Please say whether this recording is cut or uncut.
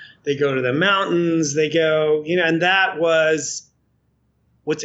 uncut